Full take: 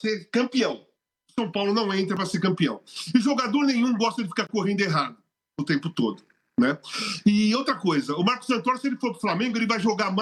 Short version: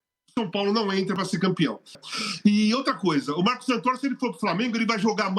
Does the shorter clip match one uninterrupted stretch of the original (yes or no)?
no